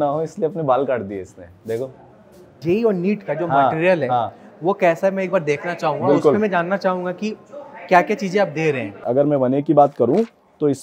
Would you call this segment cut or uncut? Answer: cut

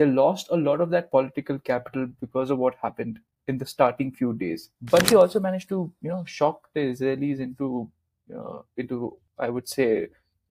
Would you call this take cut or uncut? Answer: cut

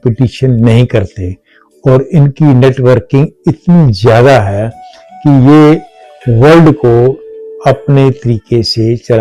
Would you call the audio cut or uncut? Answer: uncut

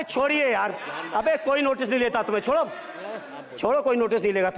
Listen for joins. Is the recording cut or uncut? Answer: uncut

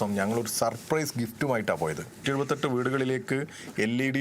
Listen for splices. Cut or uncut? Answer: cut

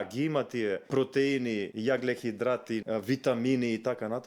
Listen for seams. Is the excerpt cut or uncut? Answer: cut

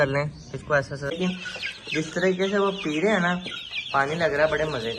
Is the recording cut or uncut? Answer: cut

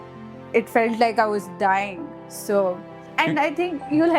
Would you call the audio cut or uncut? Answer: cut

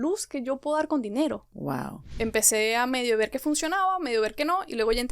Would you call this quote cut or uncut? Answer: cut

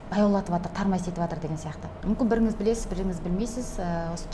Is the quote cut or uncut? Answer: cut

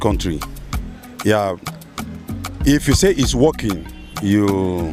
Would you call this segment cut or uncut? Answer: uncut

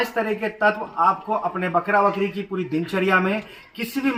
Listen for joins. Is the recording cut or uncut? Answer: uncut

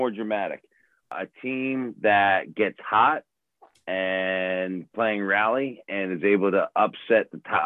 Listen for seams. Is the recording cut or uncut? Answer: cut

